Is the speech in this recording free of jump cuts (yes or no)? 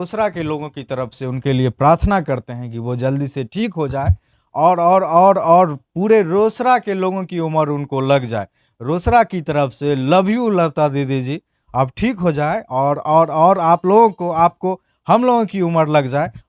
yes